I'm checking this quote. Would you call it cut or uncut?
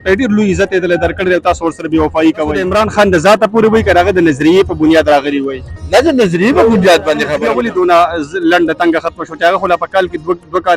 cut